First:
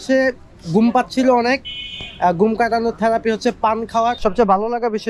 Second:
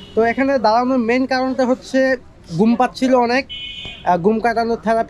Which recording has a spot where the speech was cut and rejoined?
first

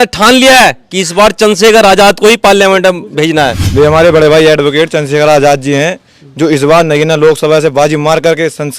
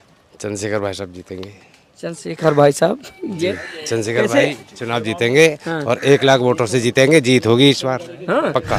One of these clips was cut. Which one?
first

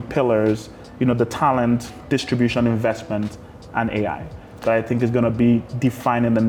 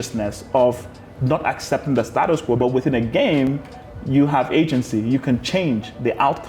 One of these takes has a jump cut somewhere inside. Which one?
second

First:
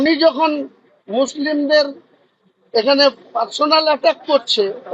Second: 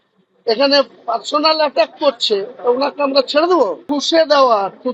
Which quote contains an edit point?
second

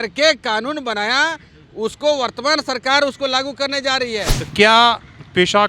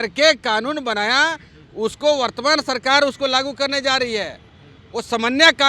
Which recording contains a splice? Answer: first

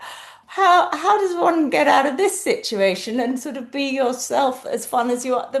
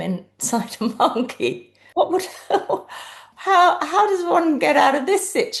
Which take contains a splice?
second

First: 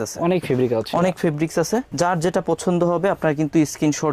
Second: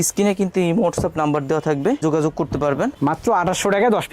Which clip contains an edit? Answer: second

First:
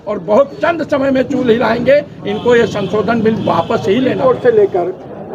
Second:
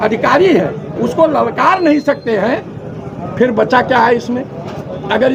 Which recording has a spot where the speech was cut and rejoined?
first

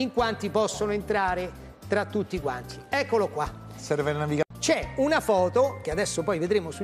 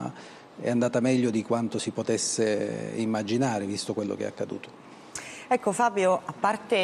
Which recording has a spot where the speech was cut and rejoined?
second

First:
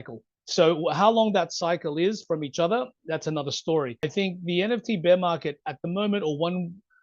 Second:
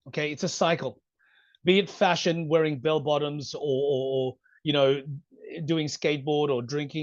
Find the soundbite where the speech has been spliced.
first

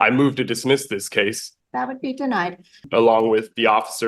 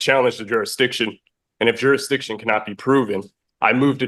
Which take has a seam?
first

